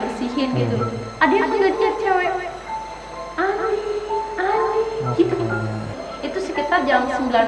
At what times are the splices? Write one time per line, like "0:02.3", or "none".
0:06.0